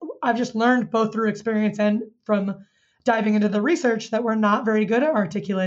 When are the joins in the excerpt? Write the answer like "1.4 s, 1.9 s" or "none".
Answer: none

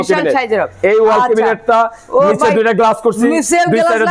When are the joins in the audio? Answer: none

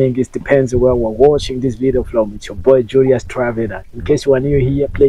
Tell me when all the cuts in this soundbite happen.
none

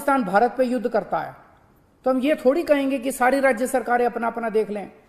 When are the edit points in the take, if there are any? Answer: none

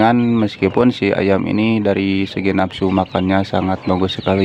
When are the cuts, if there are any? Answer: none

